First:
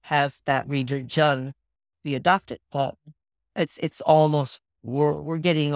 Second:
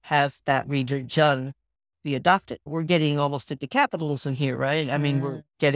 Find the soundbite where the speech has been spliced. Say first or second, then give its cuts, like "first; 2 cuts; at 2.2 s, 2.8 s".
second; 1 cut; at 2.7 s